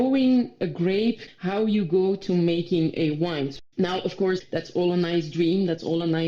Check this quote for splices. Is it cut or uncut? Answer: cut